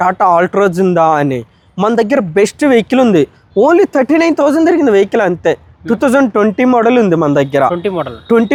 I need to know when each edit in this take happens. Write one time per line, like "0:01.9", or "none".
none